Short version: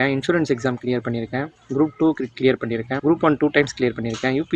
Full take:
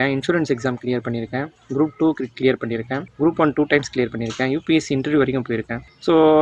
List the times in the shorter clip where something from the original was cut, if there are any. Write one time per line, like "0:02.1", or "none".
0:02.9